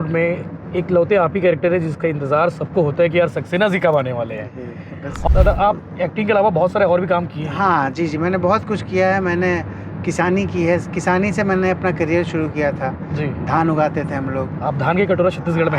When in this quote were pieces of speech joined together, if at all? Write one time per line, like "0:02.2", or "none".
0:05.2